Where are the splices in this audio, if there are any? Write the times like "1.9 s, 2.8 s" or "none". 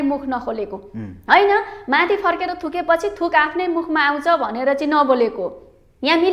none

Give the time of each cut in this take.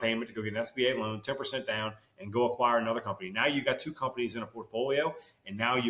none

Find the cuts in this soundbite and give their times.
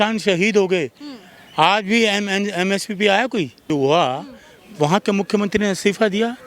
3.7 s

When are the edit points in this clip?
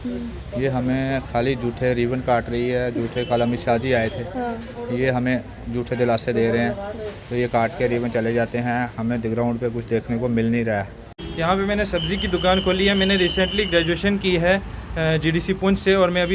11.2 s

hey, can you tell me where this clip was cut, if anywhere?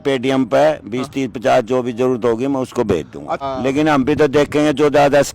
3.4 s

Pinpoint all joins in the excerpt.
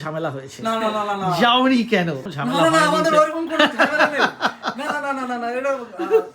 2.3 s

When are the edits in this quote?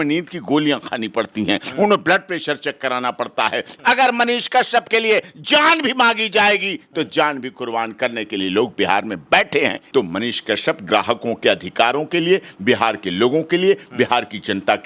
3.7 s, 9.8 s

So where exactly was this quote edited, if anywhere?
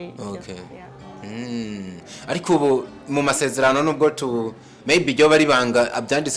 none

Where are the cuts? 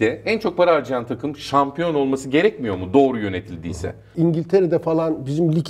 4.0 s

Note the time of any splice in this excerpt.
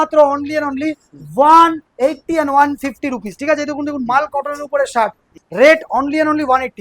5.4 s

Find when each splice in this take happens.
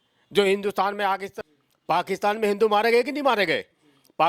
1.3 s

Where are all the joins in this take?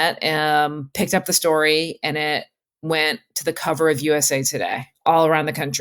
4.8 s

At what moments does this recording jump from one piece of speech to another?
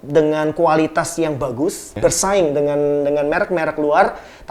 1.9 s

